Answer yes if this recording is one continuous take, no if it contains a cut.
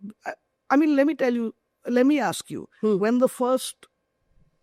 yes